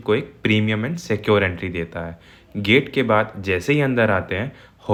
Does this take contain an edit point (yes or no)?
no